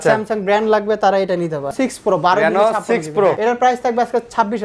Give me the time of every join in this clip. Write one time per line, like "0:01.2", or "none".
0:01.7
0:03.4